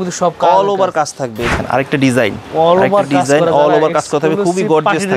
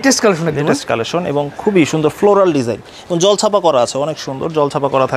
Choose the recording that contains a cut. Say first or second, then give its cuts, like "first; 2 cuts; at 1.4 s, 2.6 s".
first; 1 cut; at 1.5 s